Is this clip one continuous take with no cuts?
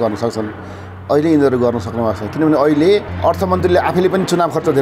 no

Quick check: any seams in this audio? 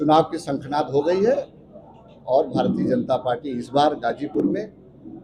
no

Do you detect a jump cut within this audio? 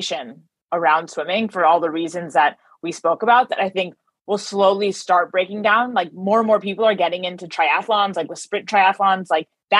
no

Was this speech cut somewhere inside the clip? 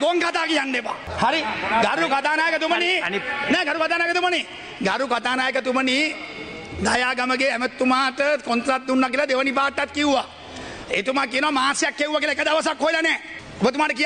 no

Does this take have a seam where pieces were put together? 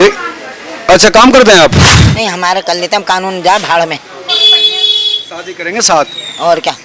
yes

